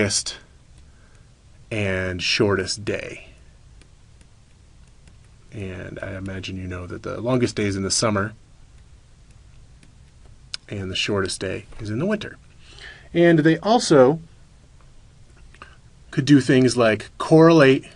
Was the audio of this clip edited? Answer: yes; 1 cut; at 16.9 s

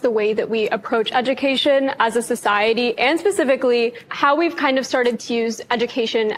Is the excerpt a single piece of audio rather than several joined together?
yes; 0 cuts

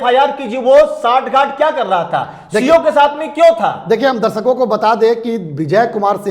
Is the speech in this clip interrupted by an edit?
no; 0 cuts

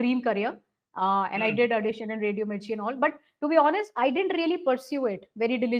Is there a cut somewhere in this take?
no; 0 cuts

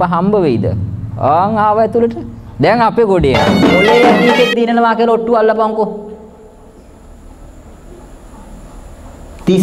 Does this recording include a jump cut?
yes; 1 cut; at 3.6 s

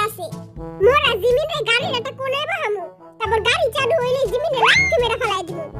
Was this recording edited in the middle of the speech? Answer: no; 0 cuts

